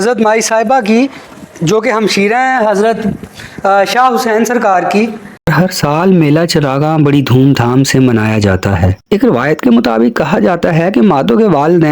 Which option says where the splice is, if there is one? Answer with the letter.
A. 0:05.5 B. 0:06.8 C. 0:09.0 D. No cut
A